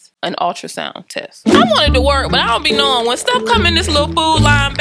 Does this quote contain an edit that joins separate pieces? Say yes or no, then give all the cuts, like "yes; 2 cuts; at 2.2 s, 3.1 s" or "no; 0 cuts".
yes; 1 cut; at 1.4 s